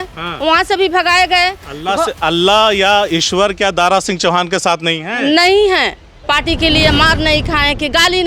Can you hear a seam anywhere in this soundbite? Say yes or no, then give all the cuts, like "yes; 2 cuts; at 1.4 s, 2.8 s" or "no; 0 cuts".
yes; 1 cut; at 6.2 s